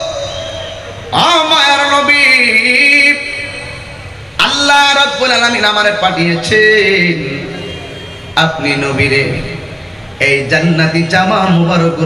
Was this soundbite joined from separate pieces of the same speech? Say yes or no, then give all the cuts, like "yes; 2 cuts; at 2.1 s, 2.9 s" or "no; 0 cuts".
no; 0 cuts